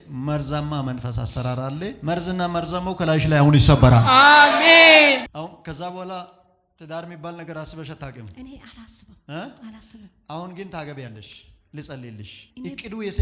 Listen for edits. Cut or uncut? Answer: cut